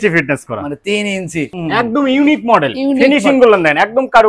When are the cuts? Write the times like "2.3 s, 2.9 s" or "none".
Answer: 1.6 s